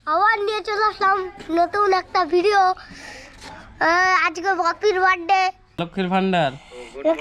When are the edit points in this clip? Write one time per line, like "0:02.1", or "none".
0:05.8